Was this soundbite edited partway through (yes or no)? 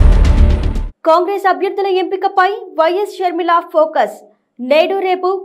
yes